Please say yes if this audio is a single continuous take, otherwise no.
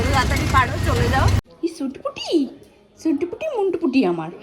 no